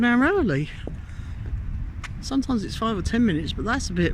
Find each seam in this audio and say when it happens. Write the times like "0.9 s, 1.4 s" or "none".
none